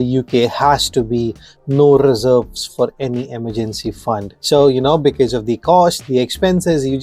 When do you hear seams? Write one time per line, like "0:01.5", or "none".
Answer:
none